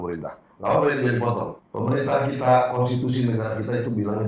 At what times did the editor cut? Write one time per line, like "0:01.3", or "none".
0:01.6